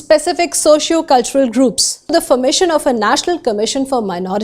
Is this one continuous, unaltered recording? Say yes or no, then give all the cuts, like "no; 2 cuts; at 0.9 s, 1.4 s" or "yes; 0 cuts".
no; 1 cut; at 2.1 s